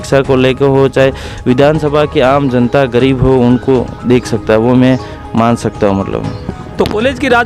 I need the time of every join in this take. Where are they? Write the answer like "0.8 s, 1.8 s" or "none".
none